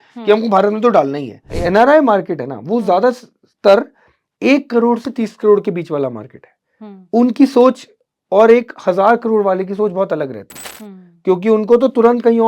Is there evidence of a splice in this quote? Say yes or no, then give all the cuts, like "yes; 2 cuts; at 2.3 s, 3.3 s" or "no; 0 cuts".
yes; 1 cut; at 1.6 s